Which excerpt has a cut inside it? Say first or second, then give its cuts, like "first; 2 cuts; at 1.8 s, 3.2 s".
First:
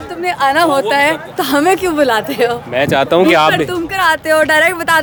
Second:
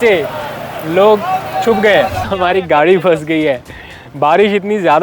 second; 1 cut; at 2.3 s